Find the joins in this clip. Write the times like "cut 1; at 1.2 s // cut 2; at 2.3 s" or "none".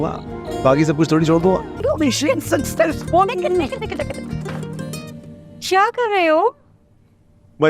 cut 1; at 1.8 s